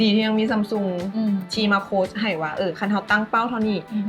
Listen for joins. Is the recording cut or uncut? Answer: uncut